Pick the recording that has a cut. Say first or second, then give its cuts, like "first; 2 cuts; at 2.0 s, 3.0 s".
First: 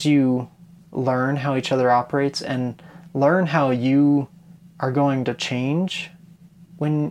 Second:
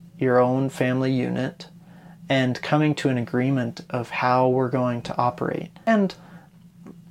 second; 1 cut; at 5.9 s